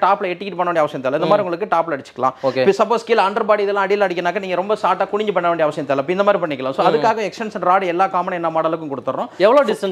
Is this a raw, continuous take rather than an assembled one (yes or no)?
yes